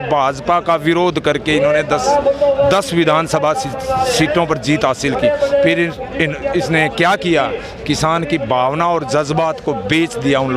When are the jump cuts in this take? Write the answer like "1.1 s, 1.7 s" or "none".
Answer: none